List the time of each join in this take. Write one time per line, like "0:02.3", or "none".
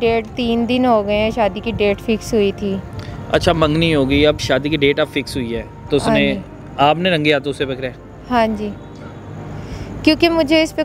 none